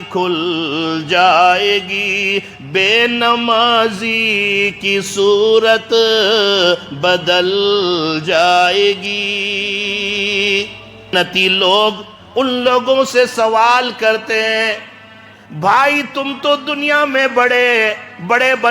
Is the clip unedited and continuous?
no; 1 cut; at 11.1 s

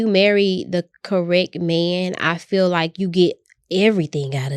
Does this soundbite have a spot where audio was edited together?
no; 0 cuts

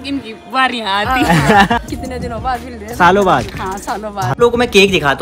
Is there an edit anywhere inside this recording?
yes; 2 cuts; at 1.8 s, 4.2 s

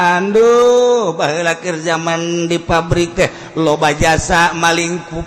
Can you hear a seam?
no; 0 cuts

